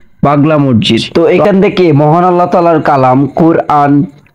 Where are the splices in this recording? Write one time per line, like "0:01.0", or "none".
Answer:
0:01.1